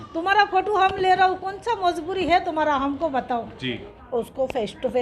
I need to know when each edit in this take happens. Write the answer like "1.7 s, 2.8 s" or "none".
3.9 s